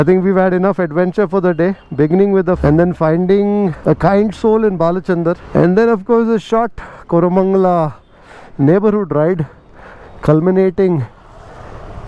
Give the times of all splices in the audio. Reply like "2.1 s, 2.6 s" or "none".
2.6 s, 3.8 s, 5.4 s